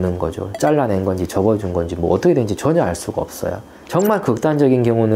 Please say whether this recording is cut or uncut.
cut